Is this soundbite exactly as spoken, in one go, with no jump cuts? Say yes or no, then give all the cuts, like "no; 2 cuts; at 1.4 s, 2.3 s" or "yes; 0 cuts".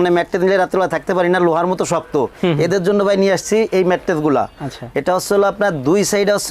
yes; 0 cuts